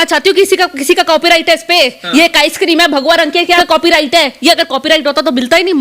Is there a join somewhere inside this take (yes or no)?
yes